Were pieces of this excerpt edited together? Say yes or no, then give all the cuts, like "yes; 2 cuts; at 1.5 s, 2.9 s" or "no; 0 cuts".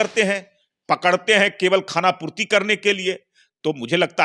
no; 0 cuts